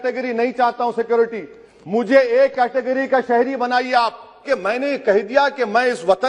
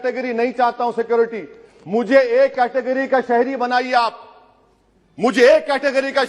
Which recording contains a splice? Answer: first; 1 cut; at 4.4 s

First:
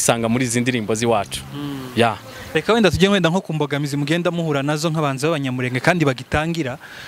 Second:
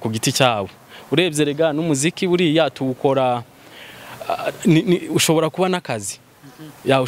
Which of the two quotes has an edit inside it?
first; 1 cut; at 2.5 s

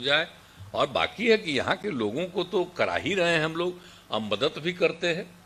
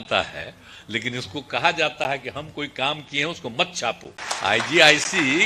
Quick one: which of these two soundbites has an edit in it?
second; 1 cut; at 4.2 s

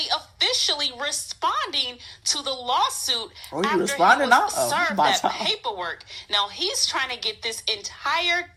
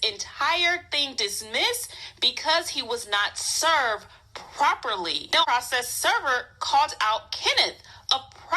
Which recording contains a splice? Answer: second; 1 cut; at 5.4 s

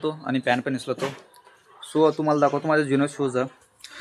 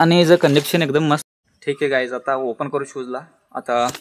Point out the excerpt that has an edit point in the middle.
second; 1 cut; at 1.3 s

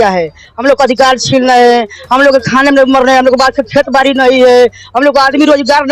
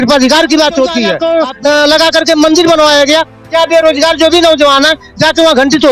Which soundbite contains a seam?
second; 1 cut; at 1.1 s

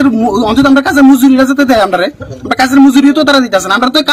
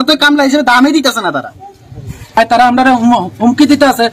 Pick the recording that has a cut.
second; 1 cut; at 2.4 s

